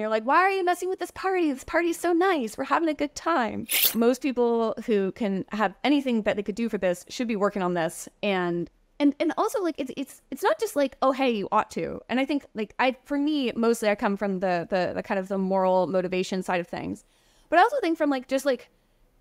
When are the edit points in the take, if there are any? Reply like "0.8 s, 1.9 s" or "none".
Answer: 3.9 s